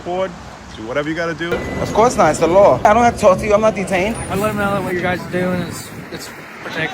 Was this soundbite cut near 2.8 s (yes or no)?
yes